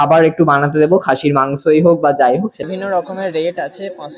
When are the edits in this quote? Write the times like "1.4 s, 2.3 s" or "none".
2.6 s